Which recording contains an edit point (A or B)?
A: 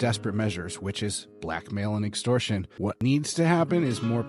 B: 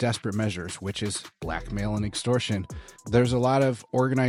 A